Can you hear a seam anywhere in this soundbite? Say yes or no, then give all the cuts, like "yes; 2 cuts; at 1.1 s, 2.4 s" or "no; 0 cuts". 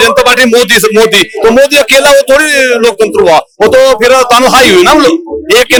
no; 0 cuts